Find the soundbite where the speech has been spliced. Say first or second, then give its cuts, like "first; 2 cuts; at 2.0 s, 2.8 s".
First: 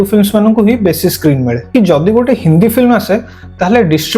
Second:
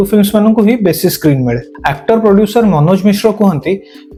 first; 1 cut; at 1.6 s